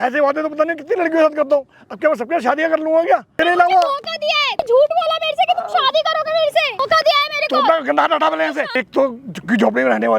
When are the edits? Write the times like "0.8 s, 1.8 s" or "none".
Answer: 3.3 s, 4.6 s, 8.8 s